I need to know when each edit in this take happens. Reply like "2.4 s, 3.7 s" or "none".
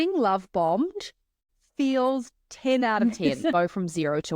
1.5 s, 3.5 s